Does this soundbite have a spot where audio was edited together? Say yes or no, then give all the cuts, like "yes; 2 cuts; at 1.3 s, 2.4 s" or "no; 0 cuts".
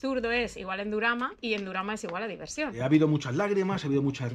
yes; 2 cuts; at 1.3 s, 2.7 s